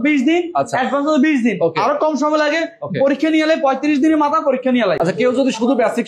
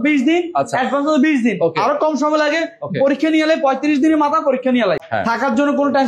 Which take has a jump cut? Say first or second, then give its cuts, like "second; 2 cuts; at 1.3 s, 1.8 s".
second; 1 cut; at 5.0 s